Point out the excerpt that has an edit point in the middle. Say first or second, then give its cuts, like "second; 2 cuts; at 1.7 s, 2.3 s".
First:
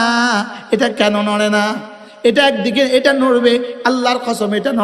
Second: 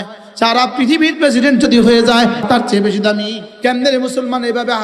second; 2 cuts; at 2.4 s, 3.4 s